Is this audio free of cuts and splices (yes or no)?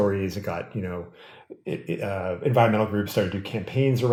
yes